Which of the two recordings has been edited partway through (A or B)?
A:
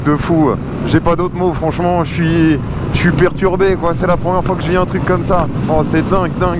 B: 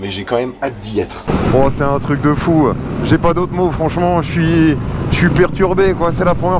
B